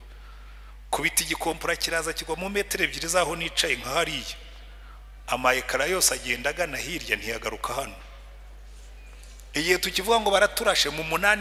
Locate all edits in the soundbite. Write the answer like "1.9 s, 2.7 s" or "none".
none